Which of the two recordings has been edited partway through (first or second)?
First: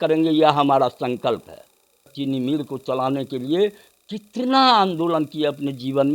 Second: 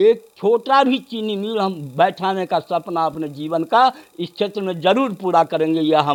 first